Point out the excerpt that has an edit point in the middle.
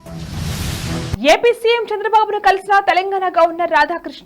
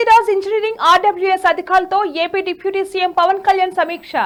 first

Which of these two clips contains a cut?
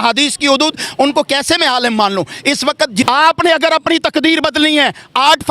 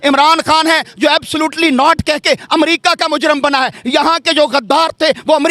first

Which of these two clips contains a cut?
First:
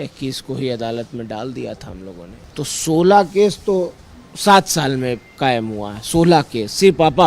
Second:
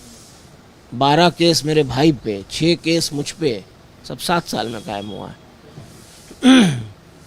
first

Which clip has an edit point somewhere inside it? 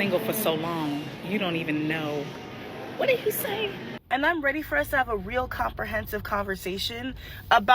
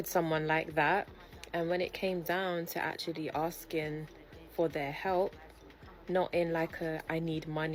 first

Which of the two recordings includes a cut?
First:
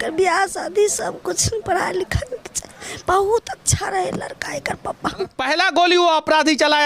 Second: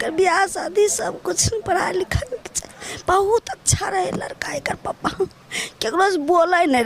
first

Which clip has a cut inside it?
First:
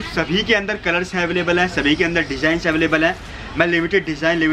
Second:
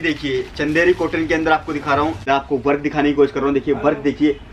second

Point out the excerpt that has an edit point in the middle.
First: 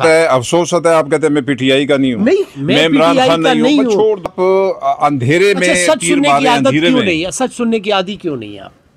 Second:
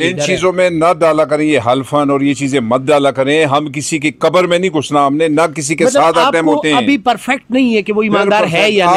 first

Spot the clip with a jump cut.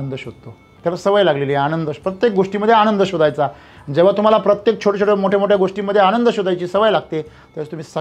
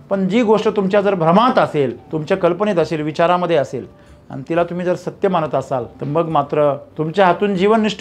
second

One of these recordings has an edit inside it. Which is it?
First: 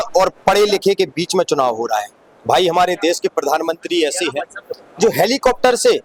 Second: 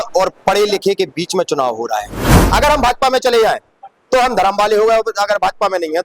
second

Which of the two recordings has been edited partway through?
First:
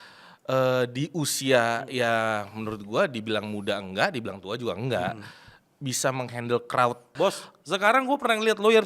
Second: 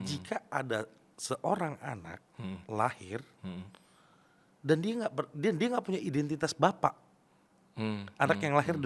first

